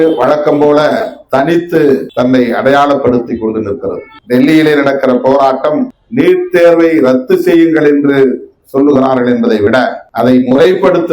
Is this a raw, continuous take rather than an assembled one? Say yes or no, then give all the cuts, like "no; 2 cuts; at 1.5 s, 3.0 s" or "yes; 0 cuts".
no; 4 cuts; at 2.1 s, 4.1 s, 6.0 s, 10.0 s